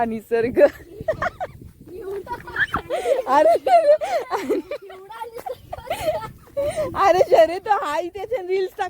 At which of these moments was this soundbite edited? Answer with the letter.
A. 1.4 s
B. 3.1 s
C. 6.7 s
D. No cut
A